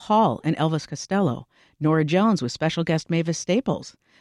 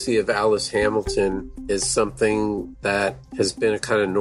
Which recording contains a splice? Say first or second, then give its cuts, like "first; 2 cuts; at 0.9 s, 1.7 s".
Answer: second; 2 cuts; at 1.5 s, 3.2 s